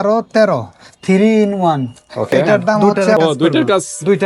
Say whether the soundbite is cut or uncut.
cut